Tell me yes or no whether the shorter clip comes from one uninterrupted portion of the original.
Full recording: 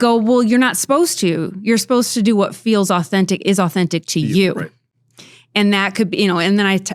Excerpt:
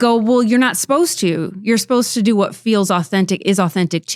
yes